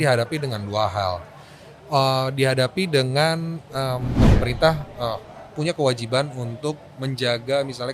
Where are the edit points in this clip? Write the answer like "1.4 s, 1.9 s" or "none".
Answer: 4.1 s